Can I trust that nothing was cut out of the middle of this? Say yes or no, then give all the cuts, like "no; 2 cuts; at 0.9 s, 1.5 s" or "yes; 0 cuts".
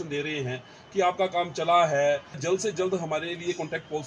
no; 1 cut; at 2.4 s